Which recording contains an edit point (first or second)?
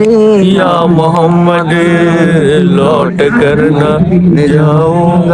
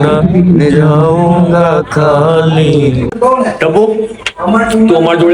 second